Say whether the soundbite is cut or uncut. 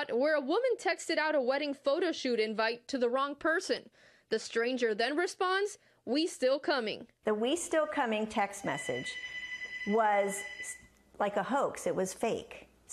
cut